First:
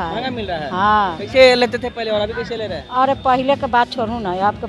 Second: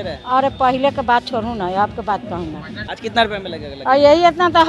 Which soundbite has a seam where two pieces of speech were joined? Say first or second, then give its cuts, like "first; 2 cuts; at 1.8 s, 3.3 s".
second; 1 cut; at 3.0 s